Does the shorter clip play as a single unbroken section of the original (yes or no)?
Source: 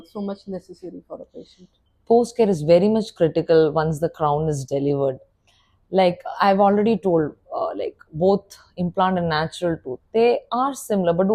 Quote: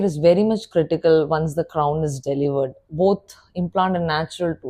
no